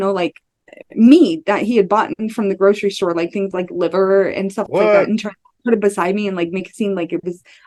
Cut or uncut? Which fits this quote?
uncut